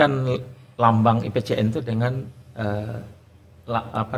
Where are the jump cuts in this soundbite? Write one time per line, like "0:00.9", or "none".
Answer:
none